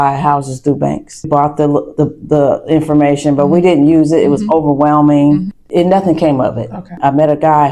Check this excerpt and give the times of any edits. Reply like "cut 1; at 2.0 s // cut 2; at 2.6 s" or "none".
cut 1; at 1.3 s // cut 2; at 5.6 s // cut 3; at 7.0 s